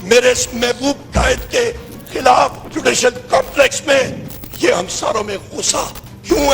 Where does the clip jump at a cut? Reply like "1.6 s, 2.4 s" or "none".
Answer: 2.7 s